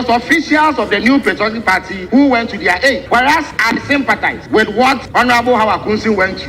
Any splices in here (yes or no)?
yes